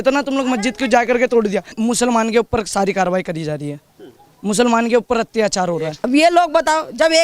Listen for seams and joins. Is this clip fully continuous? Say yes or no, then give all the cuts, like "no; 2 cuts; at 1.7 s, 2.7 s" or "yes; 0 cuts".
no; 2 cuts; at 1.7 s, 5.9 s